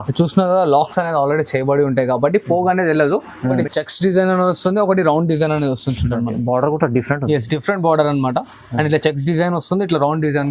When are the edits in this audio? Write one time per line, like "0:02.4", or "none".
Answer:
0:03.6